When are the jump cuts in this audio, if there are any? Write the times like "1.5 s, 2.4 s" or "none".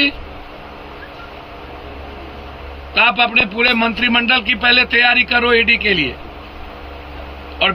none